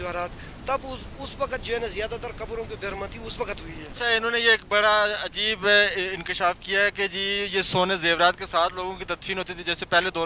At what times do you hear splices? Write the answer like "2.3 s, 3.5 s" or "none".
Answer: 3.9 s